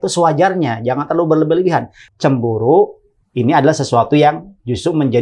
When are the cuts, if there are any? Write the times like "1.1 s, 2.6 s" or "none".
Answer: 2.1 s